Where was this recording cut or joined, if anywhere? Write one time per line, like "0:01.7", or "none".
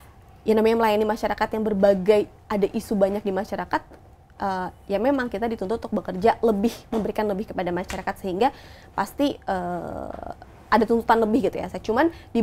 none